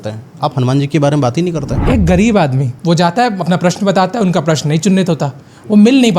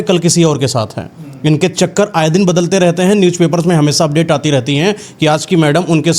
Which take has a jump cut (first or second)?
first